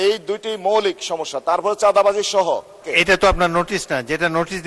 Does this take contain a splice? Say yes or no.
yes